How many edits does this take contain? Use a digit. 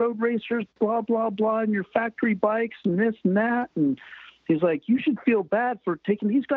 0